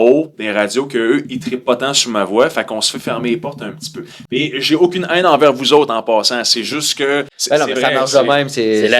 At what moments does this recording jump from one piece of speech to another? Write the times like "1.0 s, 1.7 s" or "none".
7.3 s